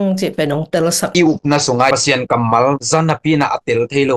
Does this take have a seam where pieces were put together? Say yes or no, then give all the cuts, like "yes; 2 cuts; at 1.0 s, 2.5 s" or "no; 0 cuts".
yes; 2 cuts; at 1.1 s, 1.9 s